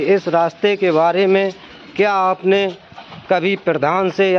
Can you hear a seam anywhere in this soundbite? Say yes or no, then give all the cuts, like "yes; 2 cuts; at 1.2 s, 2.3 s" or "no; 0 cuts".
no; 0 cuts